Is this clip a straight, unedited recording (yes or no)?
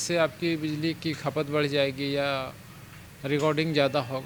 yes